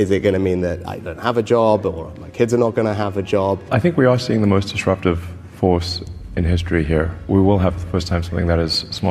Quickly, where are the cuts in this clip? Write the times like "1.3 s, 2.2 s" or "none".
3.7 s, 7.2 s